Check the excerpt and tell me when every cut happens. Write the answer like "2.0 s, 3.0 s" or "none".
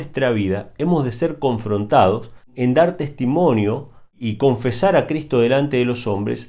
2.5 s, 4.2 s